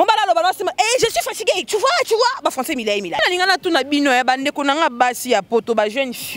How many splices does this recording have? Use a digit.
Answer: 1